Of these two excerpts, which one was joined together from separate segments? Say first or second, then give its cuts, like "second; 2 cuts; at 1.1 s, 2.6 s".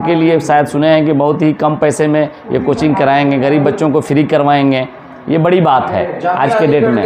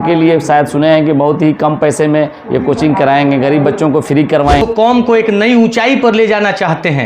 second; 1 cut; at 4.6 s